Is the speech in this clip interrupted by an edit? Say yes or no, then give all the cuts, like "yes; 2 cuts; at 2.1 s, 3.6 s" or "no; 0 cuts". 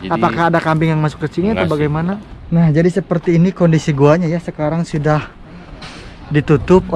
yes; 1 cut; at 2.3 s